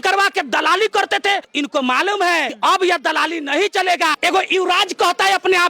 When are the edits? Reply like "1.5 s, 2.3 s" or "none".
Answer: 1.5 s, 2.5 s, 4.2 s

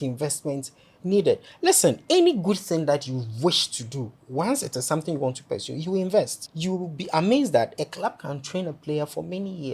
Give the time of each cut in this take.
6.4 s

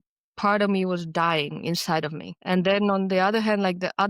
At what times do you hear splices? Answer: 2.3 s

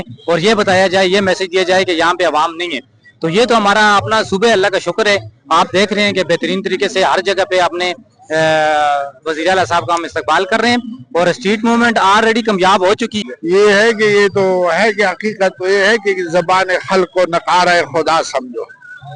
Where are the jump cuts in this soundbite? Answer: 13.1 s

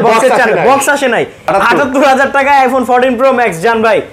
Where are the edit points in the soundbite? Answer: 1.4 s

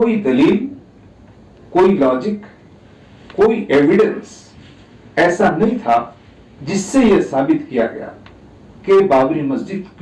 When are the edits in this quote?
none

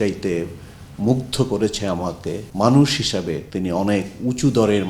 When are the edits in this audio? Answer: 2.5 s, 3.5 s

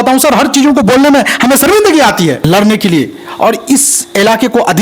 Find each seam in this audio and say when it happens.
2.4 s

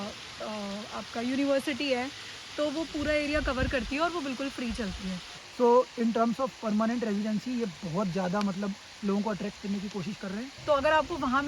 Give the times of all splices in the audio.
5.3 s, 10.5 s

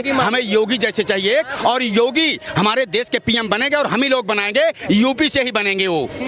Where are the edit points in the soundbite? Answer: none

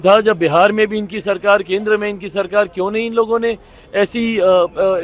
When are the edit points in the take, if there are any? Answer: none

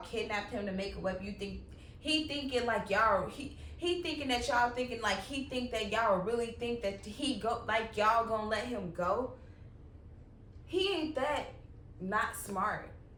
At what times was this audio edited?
none

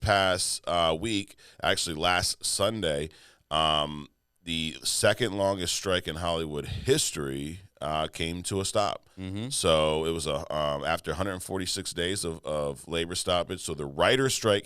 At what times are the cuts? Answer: none

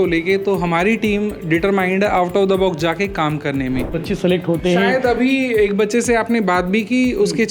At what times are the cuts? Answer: 3.9 s

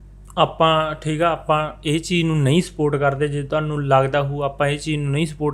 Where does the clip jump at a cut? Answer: none

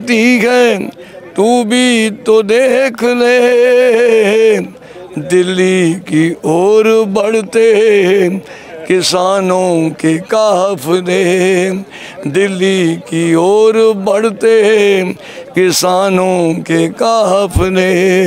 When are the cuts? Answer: none

